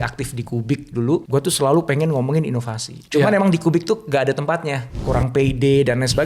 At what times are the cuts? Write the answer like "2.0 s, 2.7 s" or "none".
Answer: 1.2 s, 5.0 s